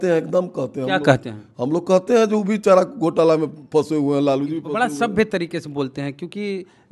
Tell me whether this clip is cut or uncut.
uncut